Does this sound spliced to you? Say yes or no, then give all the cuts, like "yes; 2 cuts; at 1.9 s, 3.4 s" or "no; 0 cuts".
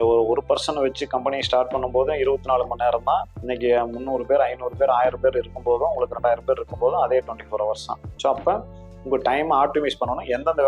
no; 0 cuts